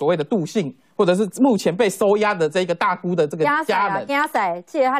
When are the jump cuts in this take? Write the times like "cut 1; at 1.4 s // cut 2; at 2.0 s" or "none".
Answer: none